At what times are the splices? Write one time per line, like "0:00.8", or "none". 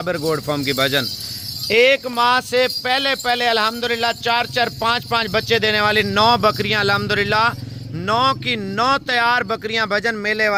none